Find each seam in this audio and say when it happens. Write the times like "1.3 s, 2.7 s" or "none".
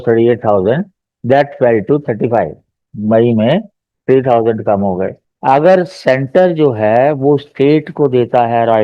5.3 s